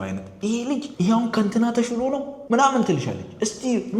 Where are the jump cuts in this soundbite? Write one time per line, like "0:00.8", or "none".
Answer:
0:00.9
0:02.3